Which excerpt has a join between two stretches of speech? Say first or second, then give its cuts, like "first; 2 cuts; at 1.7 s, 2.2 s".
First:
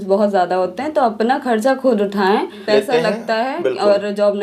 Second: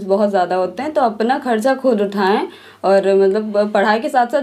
first; 1 cut; at 2.5 s